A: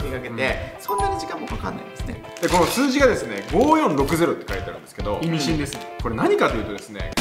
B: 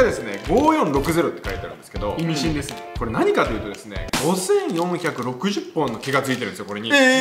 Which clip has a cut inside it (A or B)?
A